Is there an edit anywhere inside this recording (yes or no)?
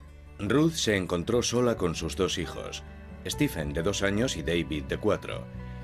no